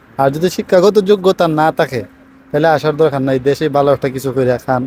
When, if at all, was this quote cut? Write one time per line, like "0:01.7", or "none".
none